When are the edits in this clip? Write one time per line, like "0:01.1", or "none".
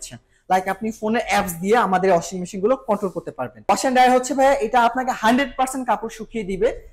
0:03.6